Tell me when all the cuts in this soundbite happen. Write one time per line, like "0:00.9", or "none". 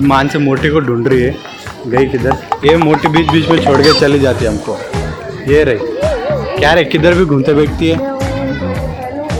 none